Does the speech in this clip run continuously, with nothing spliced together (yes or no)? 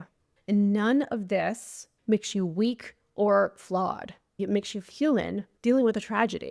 no